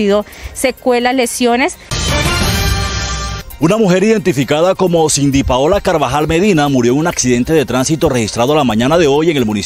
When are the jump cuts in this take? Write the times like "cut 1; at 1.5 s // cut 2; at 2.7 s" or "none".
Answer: cut 1; at 1.9 s // cut 2; at 3.4 s